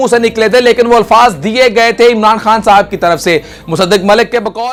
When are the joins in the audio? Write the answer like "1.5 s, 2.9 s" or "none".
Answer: none